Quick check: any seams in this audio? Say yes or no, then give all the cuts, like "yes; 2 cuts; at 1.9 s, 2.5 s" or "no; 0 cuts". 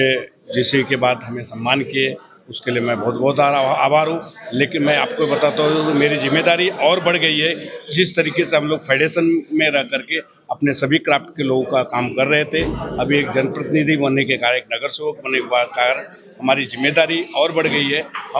no; 0 cuts